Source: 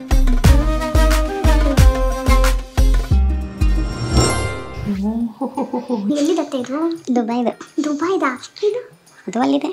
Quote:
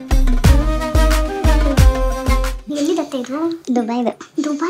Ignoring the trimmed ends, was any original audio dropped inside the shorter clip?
yes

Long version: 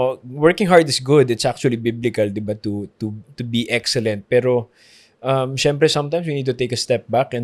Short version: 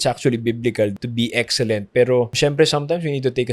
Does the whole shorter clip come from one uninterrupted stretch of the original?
no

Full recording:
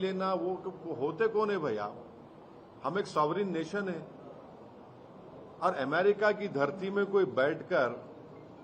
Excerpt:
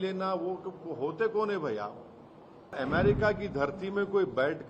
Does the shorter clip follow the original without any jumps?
no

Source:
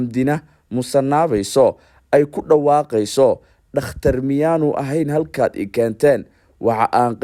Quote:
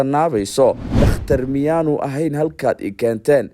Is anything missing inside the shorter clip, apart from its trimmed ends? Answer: yes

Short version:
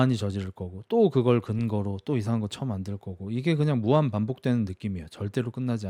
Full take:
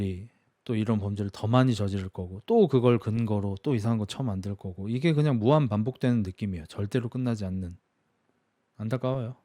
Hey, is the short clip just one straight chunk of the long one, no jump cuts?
yes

